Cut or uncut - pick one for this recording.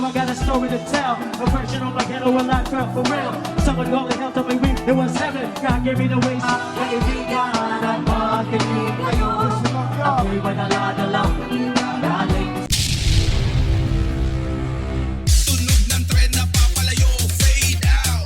uncut